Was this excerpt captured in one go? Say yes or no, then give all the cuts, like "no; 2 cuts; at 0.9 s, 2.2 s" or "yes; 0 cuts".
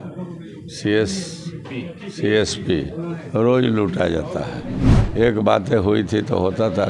no; 1 cut; at 5.0 s